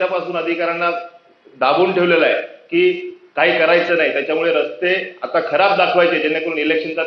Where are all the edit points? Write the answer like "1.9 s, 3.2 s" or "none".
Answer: none